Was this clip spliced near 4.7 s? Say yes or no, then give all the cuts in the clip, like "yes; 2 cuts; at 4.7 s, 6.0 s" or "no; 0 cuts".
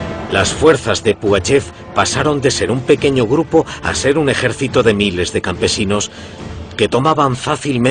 yes; 1 cut; at 4.7 s